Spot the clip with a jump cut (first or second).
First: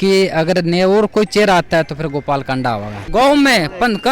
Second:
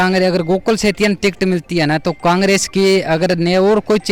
first